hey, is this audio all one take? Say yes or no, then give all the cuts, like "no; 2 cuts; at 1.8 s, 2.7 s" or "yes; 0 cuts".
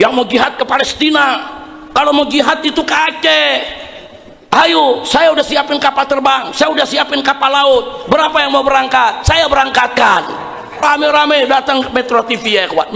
no; 1 cut; at 10.8 s